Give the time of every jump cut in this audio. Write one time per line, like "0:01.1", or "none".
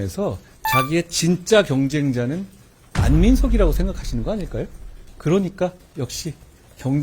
0:05.8